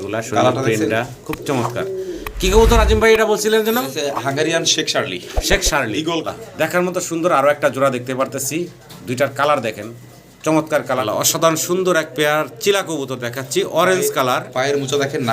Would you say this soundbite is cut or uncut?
cut